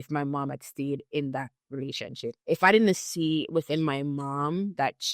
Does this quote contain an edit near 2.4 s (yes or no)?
yes